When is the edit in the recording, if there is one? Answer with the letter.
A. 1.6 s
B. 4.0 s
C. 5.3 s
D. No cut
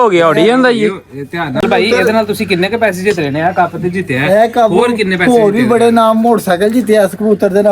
A